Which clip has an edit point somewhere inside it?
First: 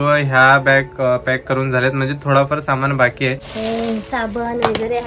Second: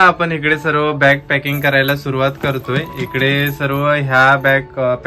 first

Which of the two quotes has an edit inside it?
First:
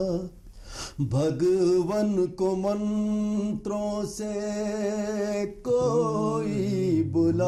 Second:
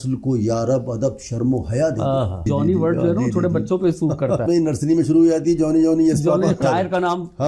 second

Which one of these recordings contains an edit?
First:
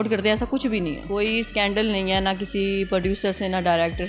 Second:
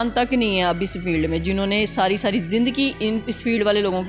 first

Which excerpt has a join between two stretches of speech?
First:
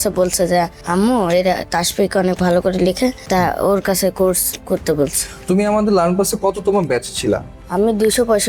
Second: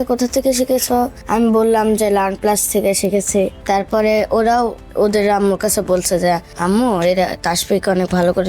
second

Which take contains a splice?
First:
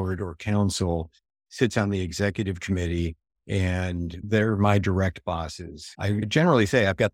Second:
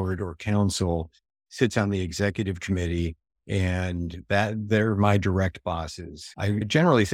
first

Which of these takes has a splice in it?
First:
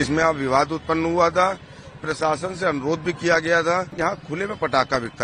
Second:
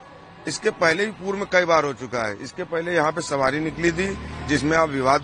first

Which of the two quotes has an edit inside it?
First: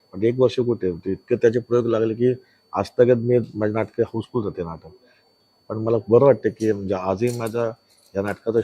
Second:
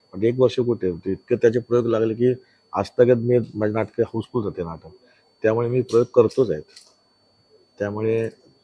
first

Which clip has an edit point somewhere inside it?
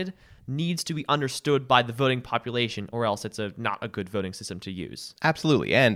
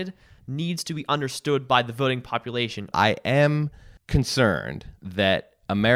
second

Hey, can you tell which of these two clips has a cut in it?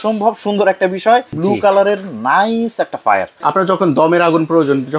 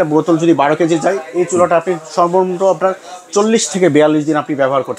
first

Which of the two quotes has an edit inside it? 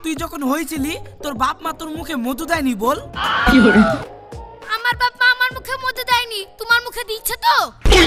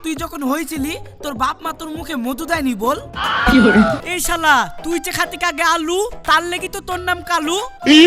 second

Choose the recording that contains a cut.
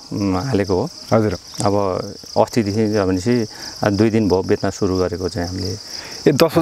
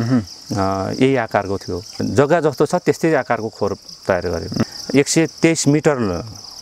second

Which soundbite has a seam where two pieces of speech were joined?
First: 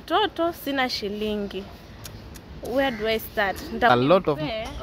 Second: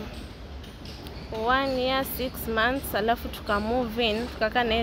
first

